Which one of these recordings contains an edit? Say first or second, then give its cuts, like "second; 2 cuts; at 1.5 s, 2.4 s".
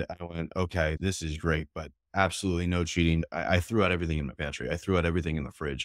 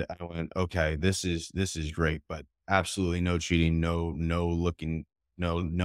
first; 2 cuts; at 1.0 s, 3.2 s